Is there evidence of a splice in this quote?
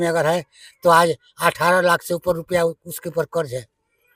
no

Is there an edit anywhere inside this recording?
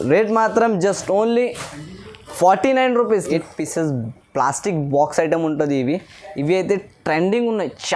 yes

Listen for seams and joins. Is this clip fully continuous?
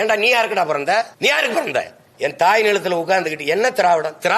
no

